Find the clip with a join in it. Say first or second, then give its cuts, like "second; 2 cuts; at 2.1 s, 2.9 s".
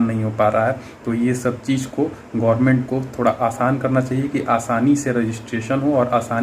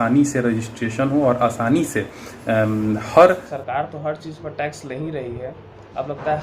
second; 1 cut; at 3.5 s